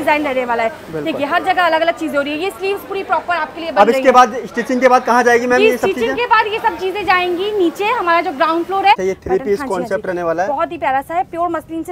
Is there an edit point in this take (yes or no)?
yes